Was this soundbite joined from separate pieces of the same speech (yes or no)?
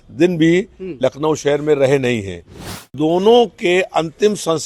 yes